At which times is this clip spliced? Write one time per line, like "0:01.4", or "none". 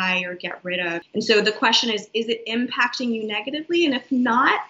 0:01.0